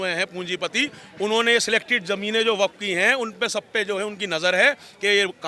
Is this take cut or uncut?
uncut